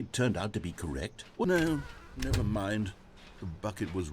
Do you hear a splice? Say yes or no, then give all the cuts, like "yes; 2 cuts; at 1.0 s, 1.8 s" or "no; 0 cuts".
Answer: yes; 1 cut; at 1.4 s